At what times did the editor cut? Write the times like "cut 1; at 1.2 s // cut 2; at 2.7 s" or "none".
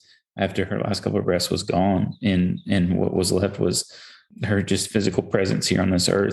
cut 1; at 4.3 s